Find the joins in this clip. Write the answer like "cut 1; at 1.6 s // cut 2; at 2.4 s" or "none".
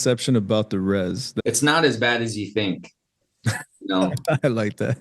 cut 1; at 1.3 s

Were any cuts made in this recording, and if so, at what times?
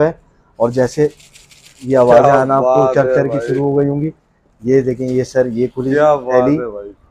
none

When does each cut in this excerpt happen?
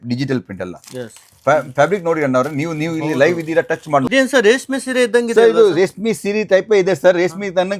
cut 1; at 4.1 s

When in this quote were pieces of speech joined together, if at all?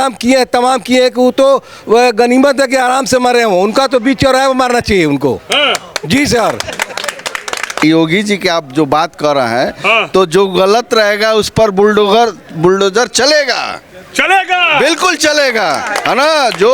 cut 1; at 7.8 s

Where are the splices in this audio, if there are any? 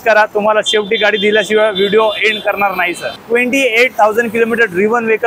cut 1; at 3.1 s

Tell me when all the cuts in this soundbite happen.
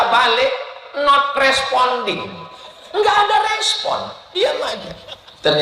none

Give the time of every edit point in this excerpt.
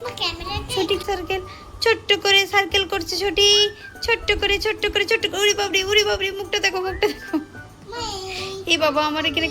cut 1; at 1.0 s

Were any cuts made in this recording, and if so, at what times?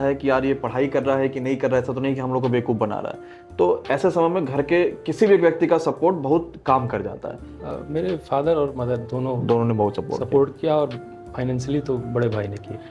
cut 1; at 7.5 s

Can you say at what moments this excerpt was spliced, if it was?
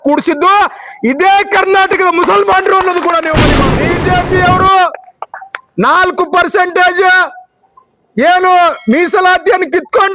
cut 1; at 3.6 s

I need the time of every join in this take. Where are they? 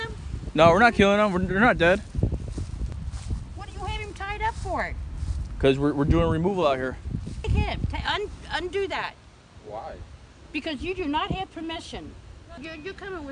cut 1; at 2.9 s // cut 2; at 7.5 s // cut 3; at 12.6 s

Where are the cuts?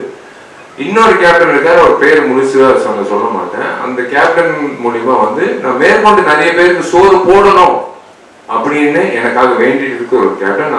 none

